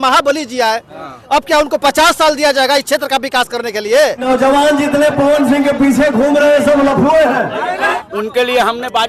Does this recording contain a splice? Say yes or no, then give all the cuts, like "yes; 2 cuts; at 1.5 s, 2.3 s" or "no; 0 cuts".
yes; 2 cuts; at 4.2 s, 8.0 s